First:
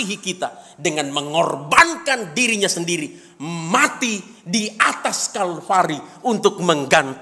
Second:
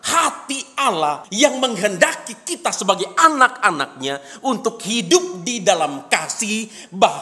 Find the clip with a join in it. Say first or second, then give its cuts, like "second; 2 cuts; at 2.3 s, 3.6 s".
second; 1 cut; at 1.3 s